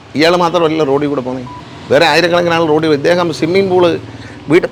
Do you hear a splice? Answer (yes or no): no